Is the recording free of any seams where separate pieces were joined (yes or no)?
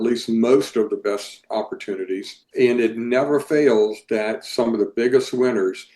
no